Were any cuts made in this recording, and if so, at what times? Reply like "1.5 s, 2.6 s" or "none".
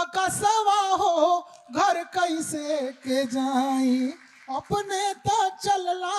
none